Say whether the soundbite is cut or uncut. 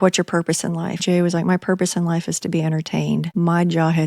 cut